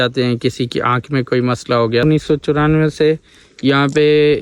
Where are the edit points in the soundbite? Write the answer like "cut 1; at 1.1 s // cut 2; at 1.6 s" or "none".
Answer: cut 1; at 2.0 s